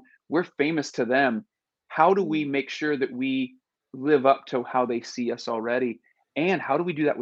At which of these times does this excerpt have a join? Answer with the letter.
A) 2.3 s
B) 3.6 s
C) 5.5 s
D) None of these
D